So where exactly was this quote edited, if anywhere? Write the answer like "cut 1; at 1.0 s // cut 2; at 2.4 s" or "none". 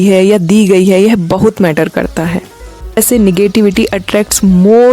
cut 1; at 3.0 s